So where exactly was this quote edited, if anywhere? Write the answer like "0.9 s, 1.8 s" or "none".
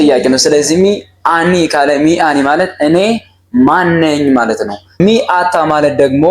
4.8 s